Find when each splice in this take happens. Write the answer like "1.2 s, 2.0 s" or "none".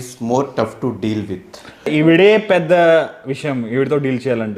1.9 s